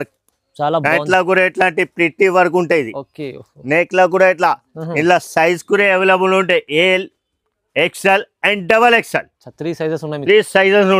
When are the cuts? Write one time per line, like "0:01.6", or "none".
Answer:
none